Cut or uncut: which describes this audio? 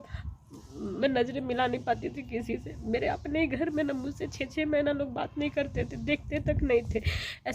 uncut